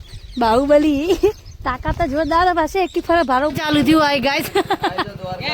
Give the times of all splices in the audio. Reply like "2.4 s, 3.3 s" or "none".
3.5 s

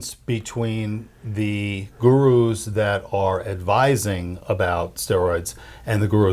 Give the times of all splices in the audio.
none

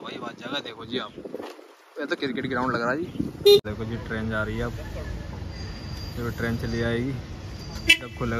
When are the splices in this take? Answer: 3.6 s

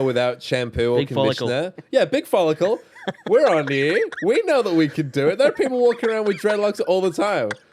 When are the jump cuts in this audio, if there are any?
none

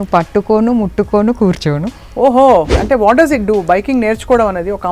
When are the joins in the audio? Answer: 2.8 s

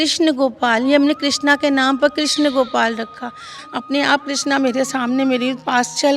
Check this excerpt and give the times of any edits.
3.6 s

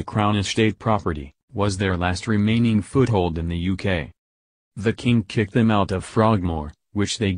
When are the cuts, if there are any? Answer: 4.2 s

